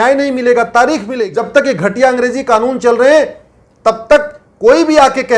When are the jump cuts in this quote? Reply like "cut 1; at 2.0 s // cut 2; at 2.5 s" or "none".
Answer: cut 1; at 1.1 s

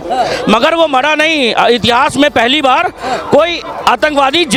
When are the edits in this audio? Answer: none

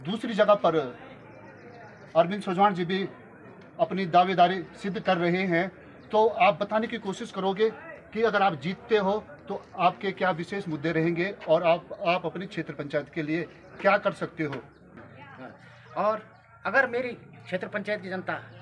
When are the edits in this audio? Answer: none

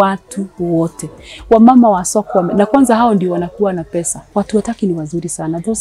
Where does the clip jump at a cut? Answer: cut 1; at 4.2 s

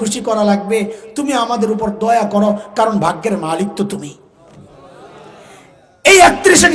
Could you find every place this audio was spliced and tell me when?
none

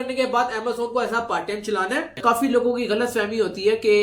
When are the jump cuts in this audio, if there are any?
cut 1; at 2.1 s

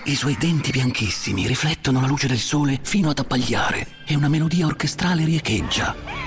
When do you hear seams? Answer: none

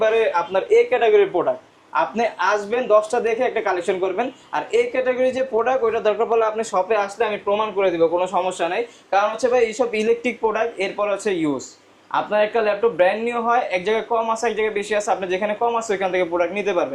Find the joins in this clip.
none

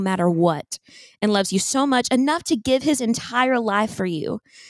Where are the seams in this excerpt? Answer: none

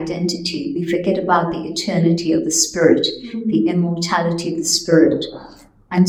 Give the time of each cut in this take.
none

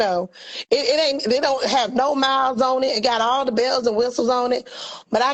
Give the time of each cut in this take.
none

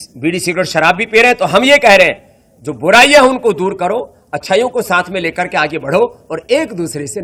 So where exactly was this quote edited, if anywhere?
none

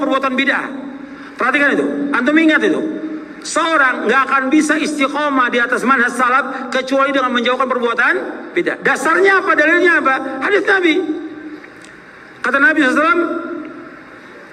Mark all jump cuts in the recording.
none

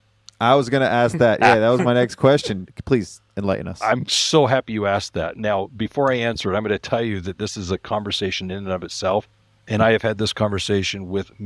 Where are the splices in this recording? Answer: cut 1; at 2.6 s

